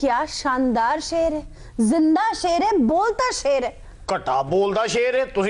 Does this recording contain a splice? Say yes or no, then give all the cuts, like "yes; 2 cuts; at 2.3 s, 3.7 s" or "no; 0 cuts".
no; 0 cuts